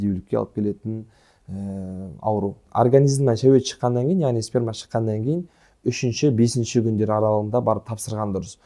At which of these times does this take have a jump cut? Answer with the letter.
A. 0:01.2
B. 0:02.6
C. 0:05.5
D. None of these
B